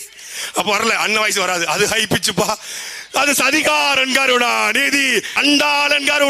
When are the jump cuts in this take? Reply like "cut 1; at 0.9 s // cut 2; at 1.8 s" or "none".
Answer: cut 1; at 5.3 s